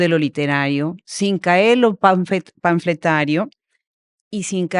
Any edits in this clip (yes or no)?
no